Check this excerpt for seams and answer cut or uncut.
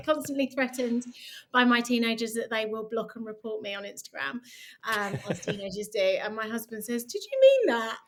uncut